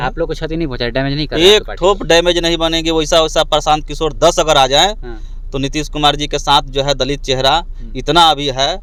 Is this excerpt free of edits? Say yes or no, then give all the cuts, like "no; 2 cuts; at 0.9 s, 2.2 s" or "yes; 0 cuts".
yes; 0 cuts